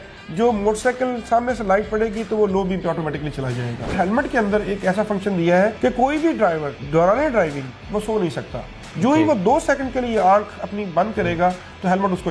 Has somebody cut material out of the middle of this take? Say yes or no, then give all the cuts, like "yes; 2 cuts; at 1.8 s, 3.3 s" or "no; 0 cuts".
yes; 3 cuts; at 3.9 s, 5.8 s, 6.7 s